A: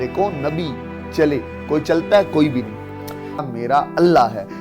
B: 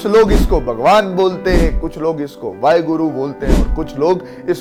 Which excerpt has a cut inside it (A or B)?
A